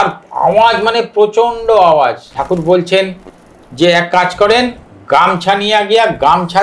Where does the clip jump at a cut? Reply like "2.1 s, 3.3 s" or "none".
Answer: 2.3 s